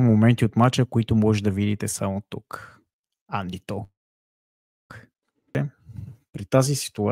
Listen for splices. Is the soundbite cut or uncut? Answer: cut